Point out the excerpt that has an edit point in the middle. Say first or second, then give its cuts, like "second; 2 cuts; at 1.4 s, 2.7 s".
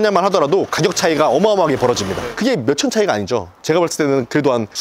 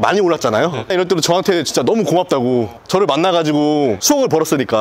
second; 3 cuts; at 0.9 s, 2.8 s, 4.0 s